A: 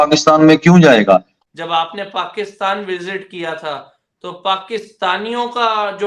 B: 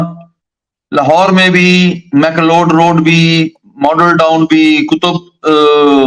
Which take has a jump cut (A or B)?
A